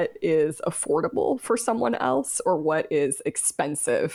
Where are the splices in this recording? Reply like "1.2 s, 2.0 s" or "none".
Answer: none